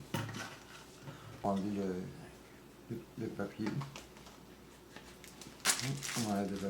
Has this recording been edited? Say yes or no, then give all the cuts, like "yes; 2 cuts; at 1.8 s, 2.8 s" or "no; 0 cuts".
yes; 2 cuts; at 1.4 s, 5.7 s